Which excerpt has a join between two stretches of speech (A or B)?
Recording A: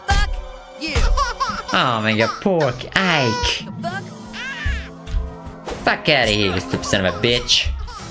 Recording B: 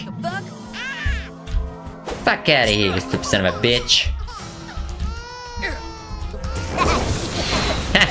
B